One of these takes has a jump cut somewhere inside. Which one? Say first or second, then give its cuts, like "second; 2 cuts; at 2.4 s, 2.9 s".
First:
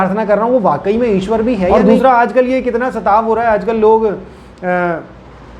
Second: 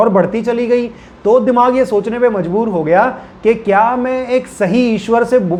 first; 1 cut; at 1.7 s